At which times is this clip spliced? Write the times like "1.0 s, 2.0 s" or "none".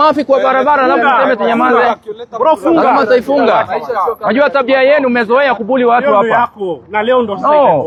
none